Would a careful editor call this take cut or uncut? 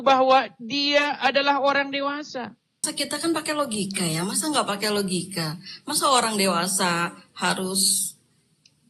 cut